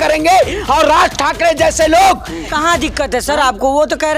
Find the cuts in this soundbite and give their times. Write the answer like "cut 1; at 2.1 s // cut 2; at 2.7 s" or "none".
cut 1; at 2.5 s